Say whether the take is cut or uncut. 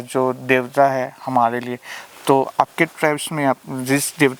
uncut